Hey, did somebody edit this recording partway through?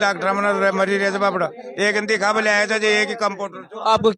no; 0 cuts

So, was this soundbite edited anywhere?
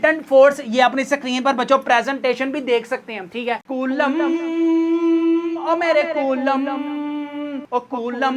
yes; 1 cut; at 3.6 s

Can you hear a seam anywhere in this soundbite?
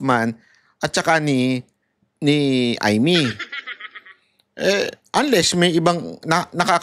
no; 0 cuts

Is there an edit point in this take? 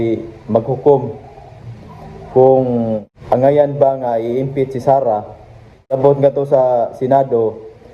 yes; 2 cuts; at 3.1 s, 6.0 s

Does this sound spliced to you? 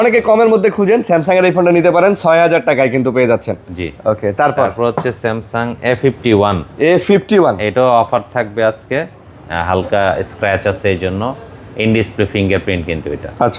no; 0 cuts

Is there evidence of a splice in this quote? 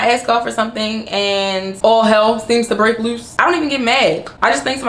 yes; 1 cut; at 1.7 s

